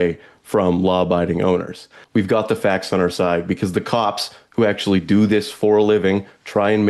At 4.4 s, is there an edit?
no; 1 cut; at 1.9 s

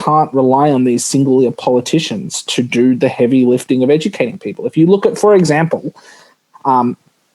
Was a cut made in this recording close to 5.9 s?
no; 0 cuts

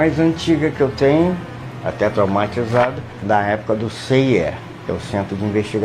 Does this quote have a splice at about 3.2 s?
yes; 2 cuts; at 3.2 s, 4.7 s

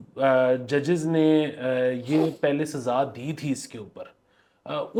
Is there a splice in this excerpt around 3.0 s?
no; 0 cuts

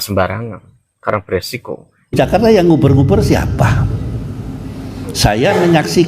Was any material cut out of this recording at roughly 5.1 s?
no; 1 cut; at 2.1 s

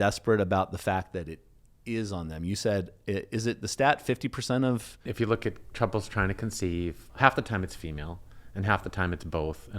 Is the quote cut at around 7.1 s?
yes; 2 cuts; at 5.1 s, 7.1 s

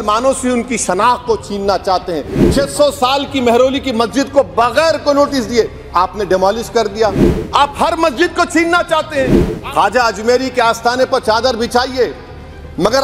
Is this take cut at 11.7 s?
no; 3 cuts; at 2.3 s, 7.2 s, 9.5 s

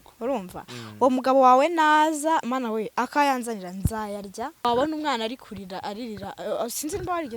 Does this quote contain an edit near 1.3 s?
no; 1 cut; at 4.6 s

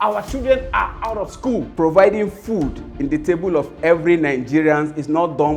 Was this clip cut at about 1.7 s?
yes; 1 cut; at 1.7 s

